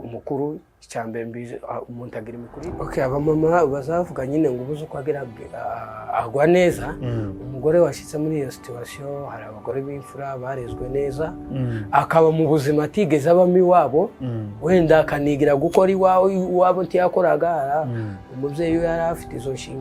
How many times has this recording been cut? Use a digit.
1